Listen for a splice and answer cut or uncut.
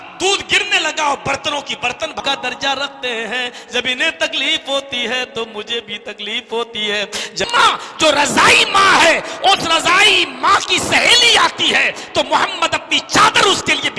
cut